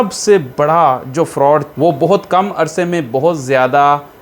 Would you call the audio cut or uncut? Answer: cut